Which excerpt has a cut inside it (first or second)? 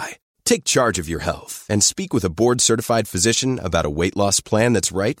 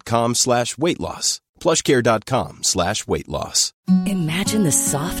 second